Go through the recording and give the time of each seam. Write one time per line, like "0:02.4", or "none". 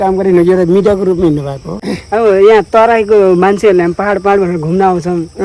0:01.9